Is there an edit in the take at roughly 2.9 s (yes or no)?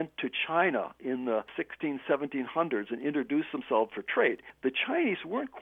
no